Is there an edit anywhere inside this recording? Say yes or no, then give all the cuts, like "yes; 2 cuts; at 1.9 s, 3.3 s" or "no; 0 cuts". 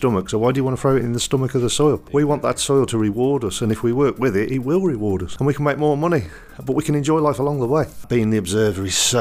yes; 3 cuts; at 2.0 s, 5.3 s, 8.0 s